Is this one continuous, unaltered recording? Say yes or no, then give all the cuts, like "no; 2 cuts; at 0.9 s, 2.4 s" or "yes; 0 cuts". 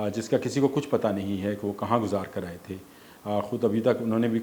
yes; 0 cuts